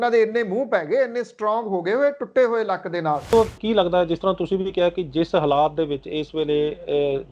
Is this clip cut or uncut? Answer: cut